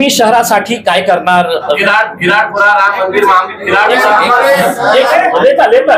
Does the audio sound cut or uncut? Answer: cut